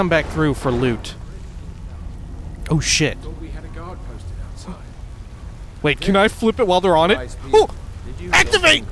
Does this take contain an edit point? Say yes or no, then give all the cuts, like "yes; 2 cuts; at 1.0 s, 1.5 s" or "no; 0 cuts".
yes; 1 cut; at 5.5 s